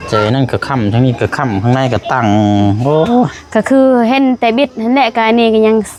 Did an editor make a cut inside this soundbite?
no; 0 cuts

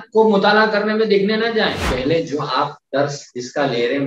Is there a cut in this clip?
yes; 1 cut; at 1.8 s

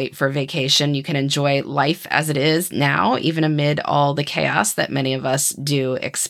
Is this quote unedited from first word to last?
yes; 0 cuts

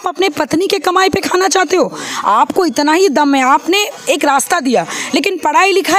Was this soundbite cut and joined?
no; 0 cuts

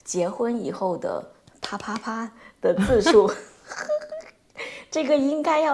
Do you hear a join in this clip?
no; 0 cuts

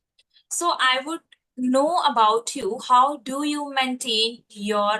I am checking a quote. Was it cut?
no; 0 cuts

